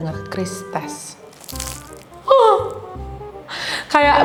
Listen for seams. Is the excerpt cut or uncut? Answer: uncut